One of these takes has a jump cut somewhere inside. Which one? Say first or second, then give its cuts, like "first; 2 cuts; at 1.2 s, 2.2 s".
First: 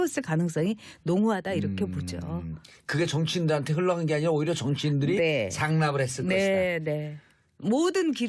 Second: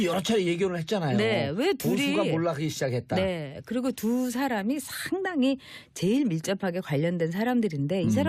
first; 1 cut; at 1.7 s